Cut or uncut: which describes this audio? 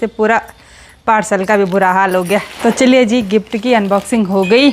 uncut